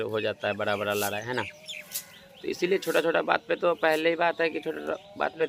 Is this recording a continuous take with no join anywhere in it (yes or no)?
yes